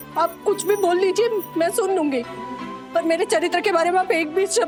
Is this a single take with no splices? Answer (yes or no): yes